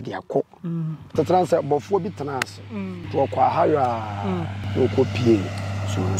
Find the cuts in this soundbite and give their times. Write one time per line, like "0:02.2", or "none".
0:01.0
0:03.0
0:04.6